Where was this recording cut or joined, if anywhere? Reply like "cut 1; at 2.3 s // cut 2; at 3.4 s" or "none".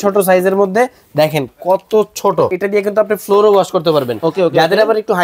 cut 1; at 2.5 s